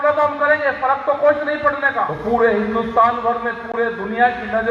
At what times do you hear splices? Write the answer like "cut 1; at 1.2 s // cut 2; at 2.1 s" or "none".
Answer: cut 1; at 2.1 s